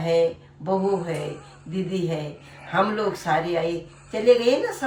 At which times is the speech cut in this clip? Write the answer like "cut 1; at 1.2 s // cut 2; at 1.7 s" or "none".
none